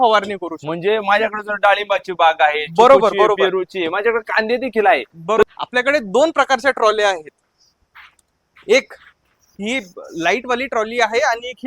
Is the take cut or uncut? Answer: cut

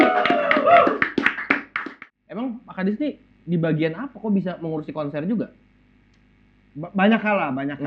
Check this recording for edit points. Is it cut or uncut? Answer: cut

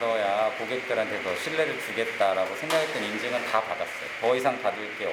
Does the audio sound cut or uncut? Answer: uncut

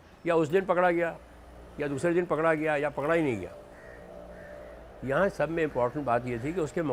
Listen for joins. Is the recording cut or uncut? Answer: uncut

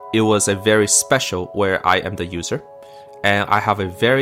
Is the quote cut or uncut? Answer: uncut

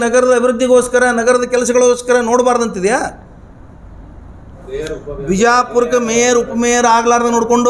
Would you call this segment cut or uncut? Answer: cut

